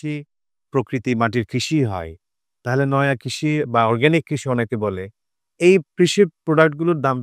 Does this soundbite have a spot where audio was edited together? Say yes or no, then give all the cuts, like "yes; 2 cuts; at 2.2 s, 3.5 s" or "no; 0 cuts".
no; 0 cuts